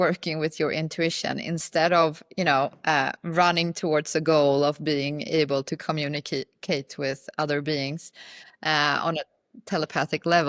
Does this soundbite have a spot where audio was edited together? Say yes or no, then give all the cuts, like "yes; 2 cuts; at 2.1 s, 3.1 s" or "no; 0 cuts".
no; 0 cuts